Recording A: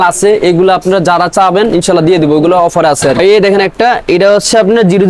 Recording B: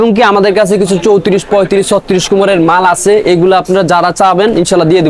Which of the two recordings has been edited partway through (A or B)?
A